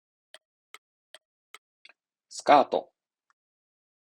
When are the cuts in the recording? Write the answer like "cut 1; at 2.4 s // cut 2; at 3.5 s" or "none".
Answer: none